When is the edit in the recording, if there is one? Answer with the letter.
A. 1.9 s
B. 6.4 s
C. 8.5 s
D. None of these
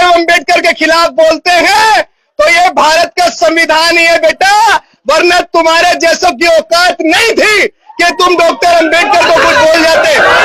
D